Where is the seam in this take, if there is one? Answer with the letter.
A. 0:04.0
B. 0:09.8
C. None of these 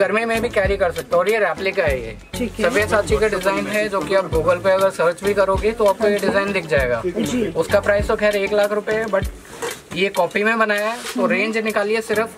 C